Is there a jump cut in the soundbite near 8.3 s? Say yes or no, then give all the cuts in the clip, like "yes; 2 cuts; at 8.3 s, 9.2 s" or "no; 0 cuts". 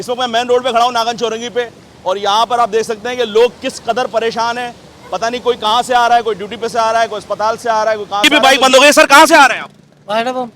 yes; 1 cut; at 8.3 s